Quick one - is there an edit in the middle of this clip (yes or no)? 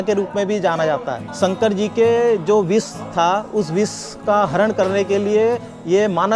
yes